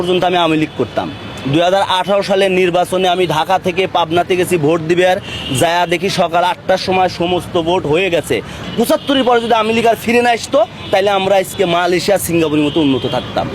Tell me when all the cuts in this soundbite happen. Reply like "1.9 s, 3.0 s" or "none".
8.6 s